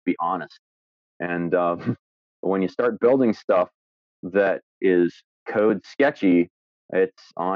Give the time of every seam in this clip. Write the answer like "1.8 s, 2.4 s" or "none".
4.8 s